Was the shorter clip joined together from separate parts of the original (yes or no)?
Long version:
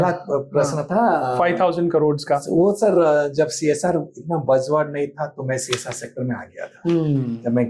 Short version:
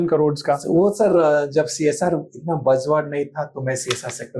no